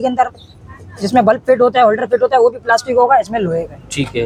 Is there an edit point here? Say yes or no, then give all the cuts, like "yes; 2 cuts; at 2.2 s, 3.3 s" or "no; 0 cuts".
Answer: no; 0 cuts